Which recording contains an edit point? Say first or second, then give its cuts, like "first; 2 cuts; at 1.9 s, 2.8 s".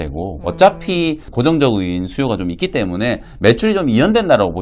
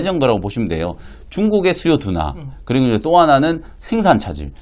first; 1 cut; at 1.3 s